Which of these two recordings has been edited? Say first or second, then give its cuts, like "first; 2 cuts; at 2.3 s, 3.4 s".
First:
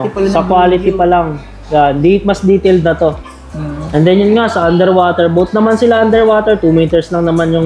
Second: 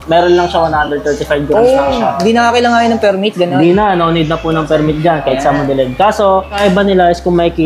second; 1 cut; at 6.5 s